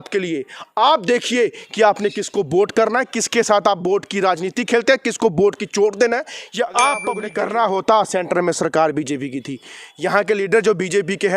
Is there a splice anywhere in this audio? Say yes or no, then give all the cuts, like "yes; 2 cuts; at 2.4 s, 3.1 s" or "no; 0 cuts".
yes; 1 cut; at 7.2 s